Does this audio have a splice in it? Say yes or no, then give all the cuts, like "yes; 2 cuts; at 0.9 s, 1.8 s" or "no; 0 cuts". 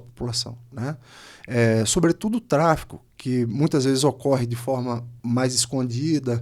yes; 1 cut; at 5.1 s